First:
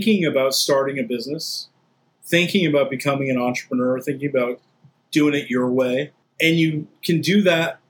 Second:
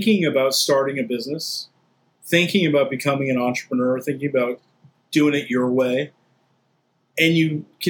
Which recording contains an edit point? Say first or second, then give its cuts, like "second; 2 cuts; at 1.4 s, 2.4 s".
first; 1 cut; at 6.2 s